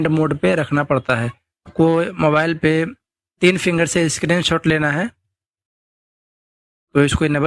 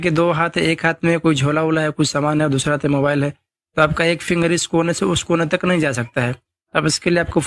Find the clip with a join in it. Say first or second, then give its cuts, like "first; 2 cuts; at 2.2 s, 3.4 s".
first; 1 cut; at 1.7 s